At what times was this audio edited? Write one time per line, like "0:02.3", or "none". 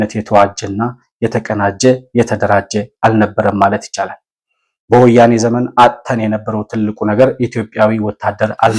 none